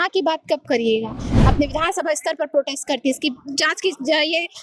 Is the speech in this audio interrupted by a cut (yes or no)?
yes